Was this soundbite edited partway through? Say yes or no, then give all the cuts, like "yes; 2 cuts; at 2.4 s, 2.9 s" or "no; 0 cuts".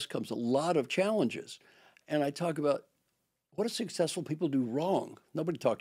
no; 0 cuts